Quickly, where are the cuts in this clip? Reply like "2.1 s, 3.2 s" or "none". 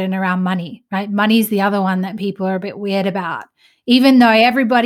none